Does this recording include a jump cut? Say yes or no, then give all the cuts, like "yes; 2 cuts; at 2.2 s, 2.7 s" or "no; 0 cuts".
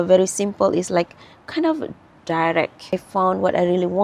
yes; 1 cut; at 2.9 s